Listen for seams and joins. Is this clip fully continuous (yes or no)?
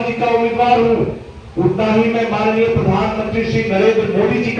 yes